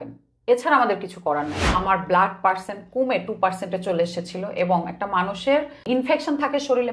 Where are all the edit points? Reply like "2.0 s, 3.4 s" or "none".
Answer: 1.6 s, 5.8 s